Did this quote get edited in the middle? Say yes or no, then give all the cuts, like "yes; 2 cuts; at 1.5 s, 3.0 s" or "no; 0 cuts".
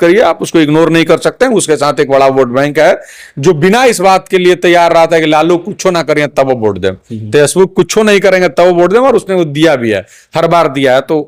no; 0 cuts